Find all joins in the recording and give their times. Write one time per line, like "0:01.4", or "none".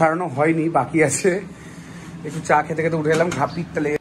none

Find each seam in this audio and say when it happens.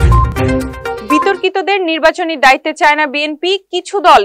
0:01.0

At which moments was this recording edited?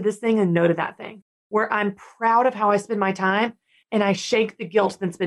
none

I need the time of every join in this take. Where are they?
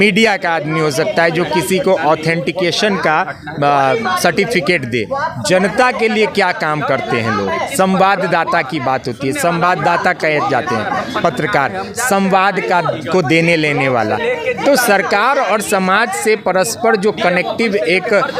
none

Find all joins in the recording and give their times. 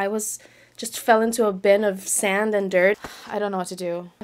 0:03.0

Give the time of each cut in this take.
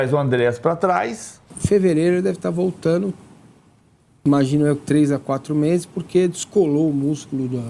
0:01.5

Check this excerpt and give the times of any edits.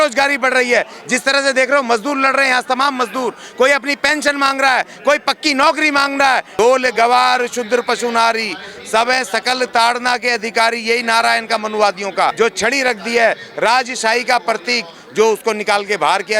0:06.5
0:12.3

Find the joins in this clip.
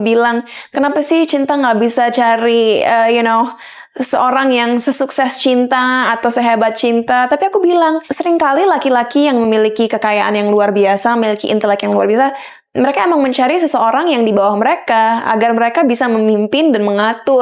none

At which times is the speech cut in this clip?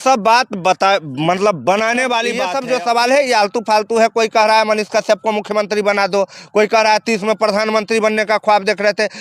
0:02.5

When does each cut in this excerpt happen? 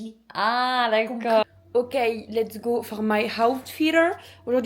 0:01.4

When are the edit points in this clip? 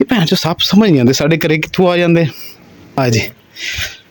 0:03.0

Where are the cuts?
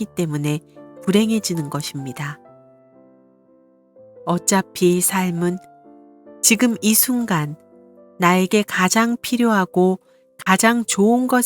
0:02.4
0:04.3

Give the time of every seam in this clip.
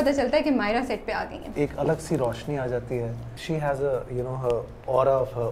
0:01.4
0:03.3

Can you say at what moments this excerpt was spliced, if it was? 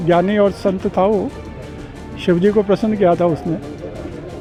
none

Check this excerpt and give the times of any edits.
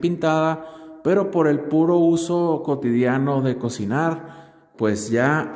none

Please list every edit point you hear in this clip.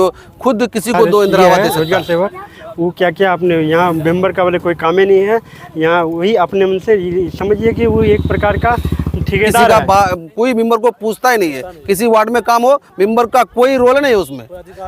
0:01.6
0:09.7

